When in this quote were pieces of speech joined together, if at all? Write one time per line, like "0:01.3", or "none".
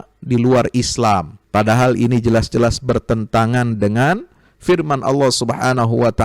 0:01.4